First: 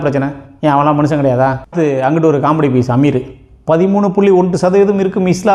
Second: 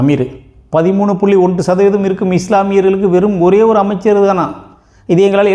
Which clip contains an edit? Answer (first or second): first